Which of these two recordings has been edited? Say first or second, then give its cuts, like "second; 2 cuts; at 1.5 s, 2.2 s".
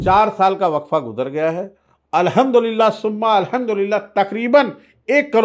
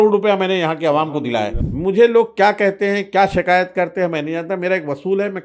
second; 1 cut; at 1.6 s